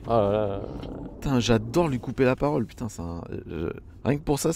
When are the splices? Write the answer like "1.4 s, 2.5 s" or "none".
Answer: none